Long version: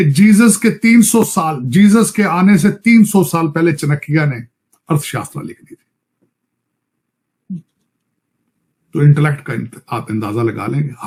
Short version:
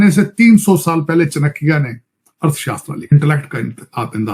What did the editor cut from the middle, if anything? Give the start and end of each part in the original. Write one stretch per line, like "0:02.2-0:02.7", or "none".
0:05.6-0:09.1